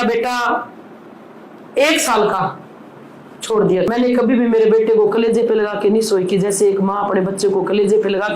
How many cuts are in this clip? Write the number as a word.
one